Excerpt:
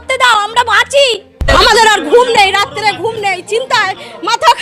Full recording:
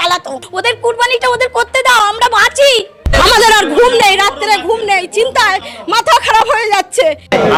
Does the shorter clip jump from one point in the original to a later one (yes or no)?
no